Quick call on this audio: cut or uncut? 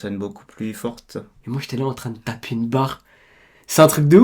cut